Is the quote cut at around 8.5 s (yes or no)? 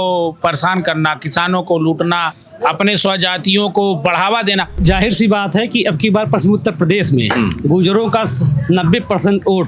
no